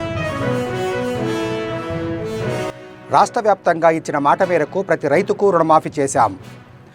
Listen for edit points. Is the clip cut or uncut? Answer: cut